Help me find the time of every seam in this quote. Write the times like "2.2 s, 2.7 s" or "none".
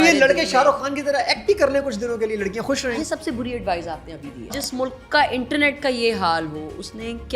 2.8 s, 4.5 s